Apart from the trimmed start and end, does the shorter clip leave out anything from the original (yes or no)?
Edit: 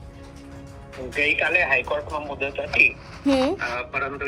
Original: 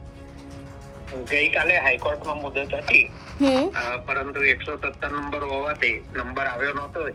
yes